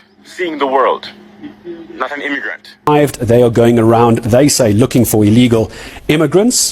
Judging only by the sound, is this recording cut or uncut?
cut